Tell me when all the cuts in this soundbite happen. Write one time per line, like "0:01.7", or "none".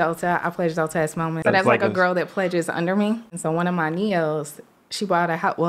0:01.4
0:03.3